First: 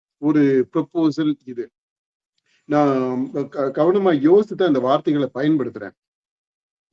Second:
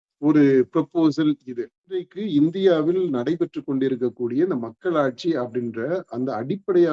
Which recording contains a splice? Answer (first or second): second